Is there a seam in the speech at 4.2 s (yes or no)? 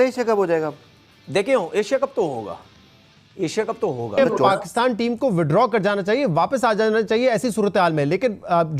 yes